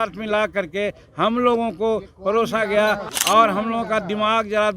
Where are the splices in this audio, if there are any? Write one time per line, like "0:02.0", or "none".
0:03.1